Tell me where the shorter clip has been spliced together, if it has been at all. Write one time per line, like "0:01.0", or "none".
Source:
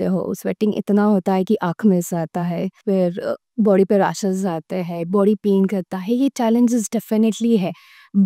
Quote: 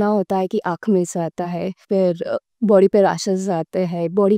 none